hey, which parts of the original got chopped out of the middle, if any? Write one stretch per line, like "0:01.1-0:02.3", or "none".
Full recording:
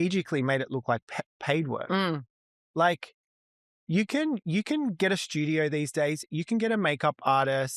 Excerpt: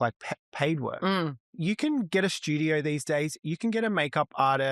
0:02.4-0:04.4